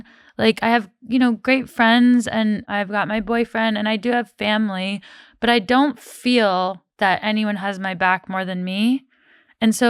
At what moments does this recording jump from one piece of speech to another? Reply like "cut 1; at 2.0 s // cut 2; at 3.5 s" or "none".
cut 1; at 2.6 s